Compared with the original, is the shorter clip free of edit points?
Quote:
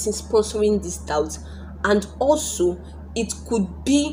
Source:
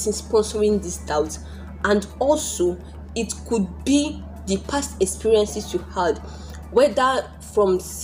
yes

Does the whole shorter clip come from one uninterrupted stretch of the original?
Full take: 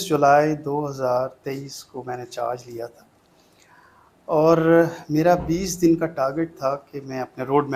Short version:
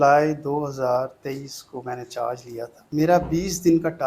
no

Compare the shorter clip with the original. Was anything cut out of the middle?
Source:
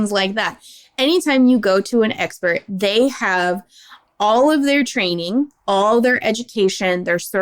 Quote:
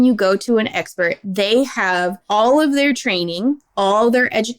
yes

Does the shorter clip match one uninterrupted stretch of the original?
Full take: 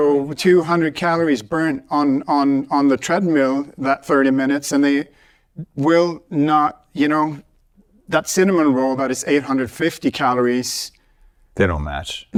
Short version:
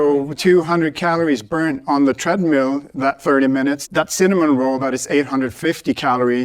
no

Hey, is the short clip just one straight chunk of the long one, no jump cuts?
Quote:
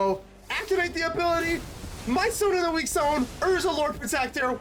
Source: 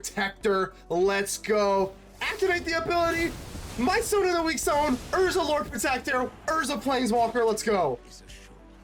yes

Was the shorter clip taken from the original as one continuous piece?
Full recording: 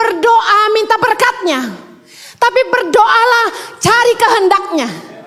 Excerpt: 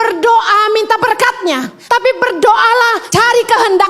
no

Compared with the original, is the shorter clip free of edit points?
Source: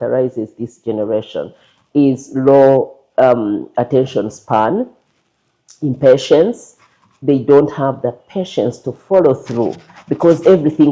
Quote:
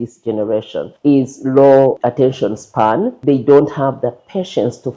no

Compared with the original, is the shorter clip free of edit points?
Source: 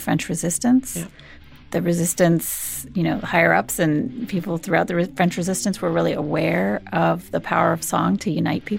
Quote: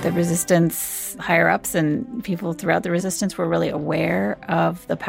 no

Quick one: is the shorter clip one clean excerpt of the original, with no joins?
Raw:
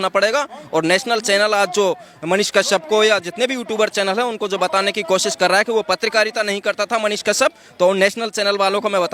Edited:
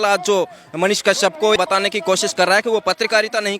no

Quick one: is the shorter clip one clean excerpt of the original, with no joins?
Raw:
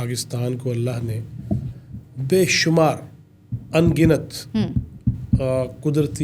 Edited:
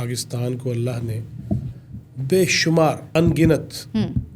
no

